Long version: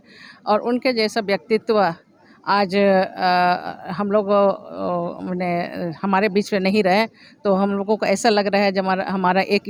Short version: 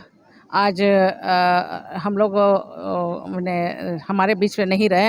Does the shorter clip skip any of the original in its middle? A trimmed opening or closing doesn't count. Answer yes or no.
no